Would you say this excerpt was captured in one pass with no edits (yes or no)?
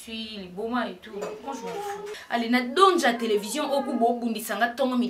no